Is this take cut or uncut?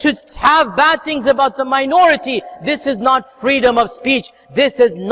uncut